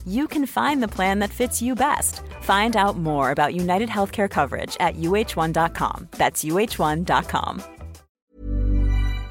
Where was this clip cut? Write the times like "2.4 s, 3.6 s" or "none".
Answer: 8.2 s

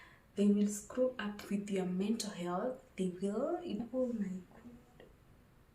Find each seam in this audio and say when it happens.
3.8 s

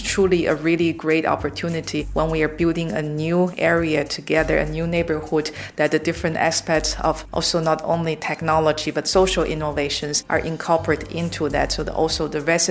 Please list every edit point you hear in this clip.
2.1 s, 7.2 s, 10.1 s

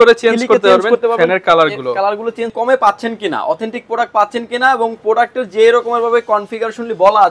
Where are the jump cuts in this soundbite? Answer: 2.5 s

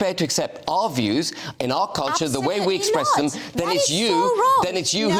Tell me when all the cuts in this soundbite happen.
none

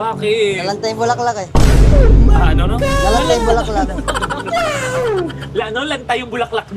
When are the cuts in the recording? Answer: none

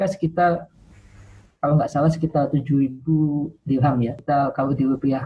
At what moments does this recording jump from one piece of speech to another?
4.2 s

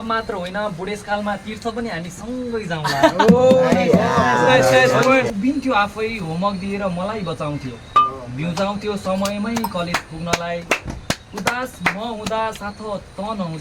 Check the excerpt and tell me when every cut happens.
5.3 s

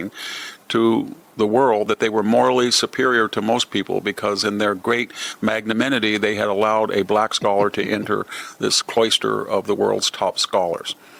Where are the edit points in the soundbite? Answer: none

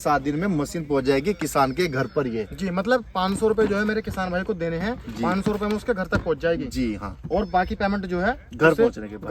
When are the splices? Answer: none

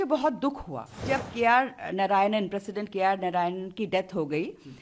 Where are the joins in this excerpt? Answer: 1.0 s

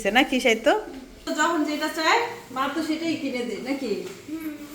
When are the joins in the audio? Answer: 1.2 s

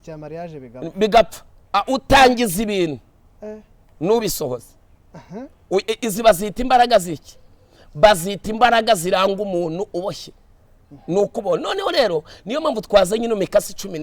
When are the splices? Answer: none

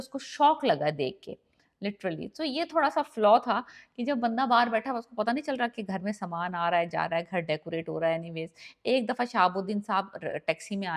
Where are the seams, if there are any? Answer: none

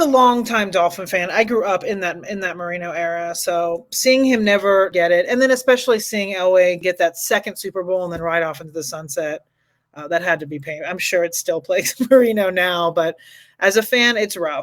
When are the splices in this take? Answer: 4.9 s, 6.8 s

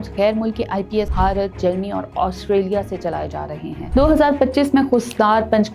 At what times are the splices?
3.8 s

